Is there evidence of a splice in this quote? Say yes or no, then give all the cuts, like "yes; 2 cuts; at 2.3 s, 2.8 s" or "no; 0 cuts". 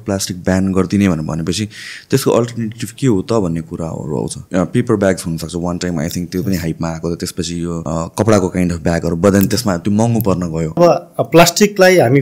yes; 3 cuts; at 4.4 s, 7.8 s, 10.8 s